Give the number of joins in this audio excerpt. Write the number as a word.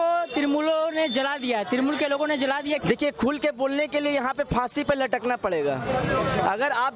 one